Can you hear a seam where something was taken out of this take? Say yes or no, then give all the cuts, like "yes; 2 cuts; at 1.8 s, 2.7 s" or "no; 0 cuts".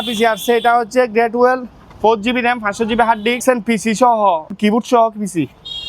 yes; 2 cuts; at 3.4 s, 4.5 s